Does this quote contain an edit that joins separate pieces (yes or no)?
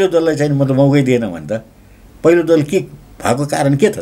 no